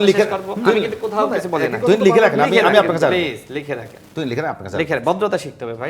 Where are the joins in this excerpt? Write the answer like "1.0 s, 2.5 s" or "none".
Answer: none